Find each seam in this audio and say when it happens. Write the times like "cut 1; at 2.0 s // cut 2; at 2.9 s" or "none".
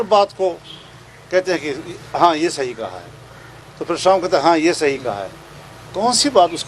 none